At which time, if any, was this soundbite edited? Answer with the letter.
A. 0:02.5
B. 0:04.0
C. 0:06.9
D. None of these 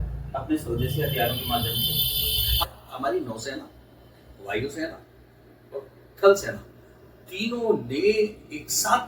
A